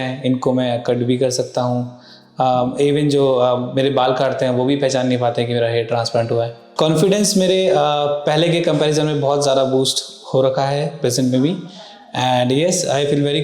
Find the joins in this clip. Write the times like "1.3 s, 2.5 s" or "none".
6.6 s